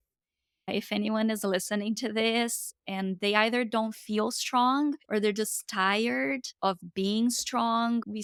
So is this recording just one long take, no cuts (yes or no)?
yes